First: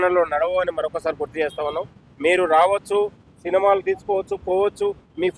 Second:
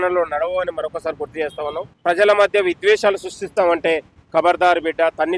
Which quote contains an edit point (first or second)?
second